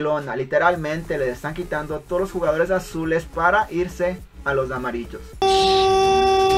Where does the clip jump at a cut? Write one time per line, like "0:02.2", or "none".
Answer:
0:05.4